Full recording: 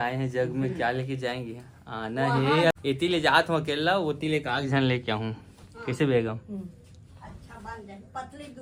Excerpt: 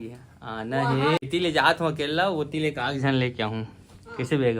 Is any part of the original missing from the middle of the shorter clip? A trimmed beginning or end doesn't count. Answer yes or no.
yes